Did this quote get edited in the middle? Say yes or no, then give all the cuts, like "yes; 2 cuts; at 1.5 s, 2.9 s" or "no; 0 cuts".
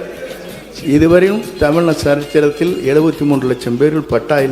no; 0 cuts